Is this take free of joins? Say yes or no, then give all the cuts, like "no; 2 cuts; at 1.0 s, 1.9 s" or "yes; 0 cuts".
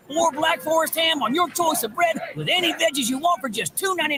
yes; 0 cuts